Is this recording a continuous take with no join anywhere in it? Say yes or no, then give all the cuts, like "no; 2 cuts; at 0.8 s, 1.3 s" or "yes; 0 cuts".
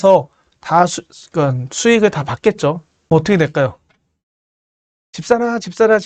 no; 1 cut; at 2.9 s